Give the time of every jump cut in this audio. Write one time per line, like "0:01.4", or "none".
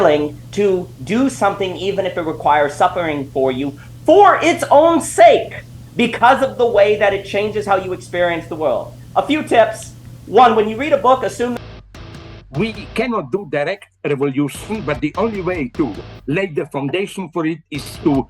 0:11.5